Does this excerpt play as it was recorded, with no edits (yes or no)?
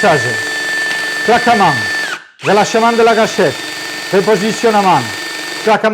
yes